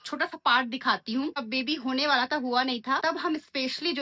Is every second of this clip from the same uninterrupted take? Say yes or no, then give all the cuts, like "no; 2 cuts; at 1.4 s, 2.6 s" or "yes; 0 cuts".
no; 2 cuts; at 1.4 s, 3.0 s